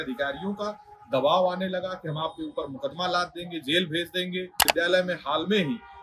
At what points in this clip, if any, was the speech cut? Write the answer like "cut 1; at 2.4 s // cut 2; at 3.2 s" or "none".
cut 1; at 4.6 s